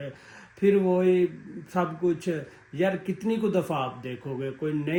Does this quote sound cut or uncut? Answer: uncut